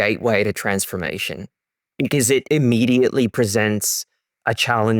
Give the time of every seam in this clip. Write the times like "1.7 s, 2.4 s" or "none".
2.4 s